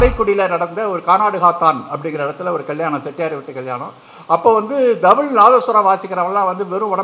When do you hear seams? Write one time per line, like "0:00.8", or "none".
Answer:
none